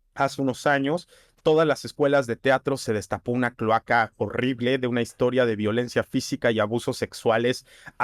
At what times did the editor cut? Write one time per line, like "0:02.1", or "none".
none